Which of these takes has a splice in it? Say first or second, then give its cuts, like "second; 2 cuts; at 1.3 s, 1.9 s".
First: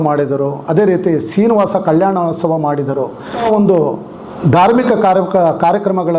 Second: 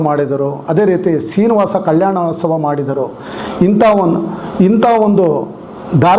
first; 1 cut; at 3.4 s